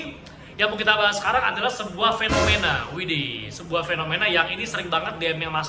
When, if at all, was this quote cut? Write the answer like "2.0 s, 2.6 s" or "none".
none

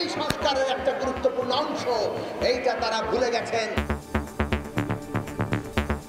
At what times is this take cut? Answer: 3.7 s

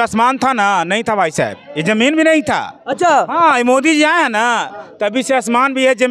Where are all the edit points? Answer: none

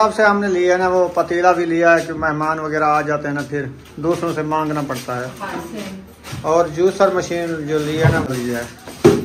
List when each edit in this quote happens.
8.3 s

